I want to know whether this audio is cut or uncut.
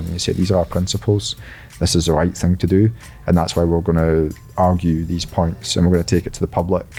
uncut